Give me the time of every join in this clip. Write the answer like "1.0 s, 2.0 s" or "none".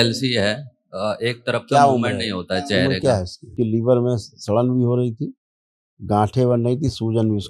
3.5 s